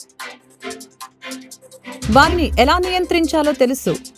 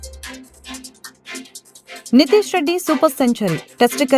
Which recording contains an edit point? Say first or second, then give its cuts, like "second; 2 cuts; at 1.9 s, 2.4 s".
first; 2 cuts; at 1.1 s, 2.1 s